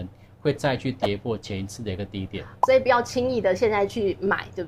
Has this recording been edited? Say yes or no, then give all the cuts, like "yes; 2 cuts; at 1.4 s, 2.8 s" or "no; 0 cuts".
yes; 1 cut; at 2.5 s